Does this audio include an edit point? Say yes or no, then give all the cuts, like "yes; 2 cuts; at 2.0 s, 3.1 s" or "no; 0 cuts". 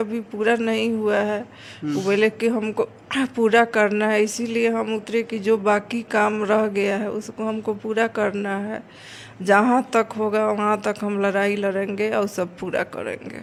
no; 0 cuts